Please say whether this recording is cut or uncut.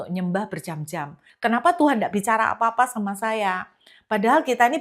cut